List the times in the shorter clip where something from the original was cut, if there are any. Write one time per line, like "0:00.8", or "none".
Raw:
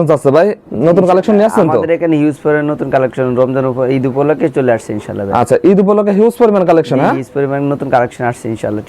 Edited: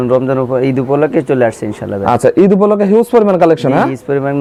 none